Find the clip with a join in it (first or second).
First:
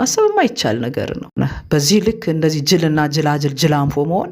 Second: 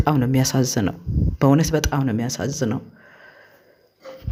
first